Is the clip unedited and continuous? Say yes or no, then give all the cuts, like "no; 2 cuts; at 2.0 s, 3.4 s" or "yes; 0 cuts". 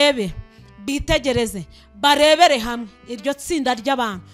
yes; 0 cuts